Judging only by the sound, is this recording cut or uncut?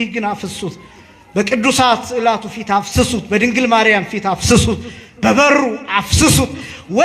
uncut